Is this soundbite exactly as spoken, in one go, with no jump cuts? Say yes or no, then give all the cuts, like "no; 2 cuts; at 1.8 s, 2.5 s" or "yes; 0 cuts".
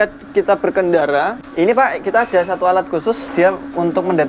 no; 1 cut; at 1.4 s